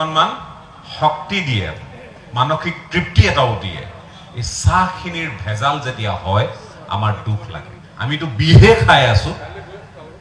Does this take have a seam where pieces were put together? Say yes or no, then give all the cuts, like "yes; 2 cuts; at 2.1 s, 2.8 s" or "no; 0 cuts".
yes; 1 cut; at 7.8 s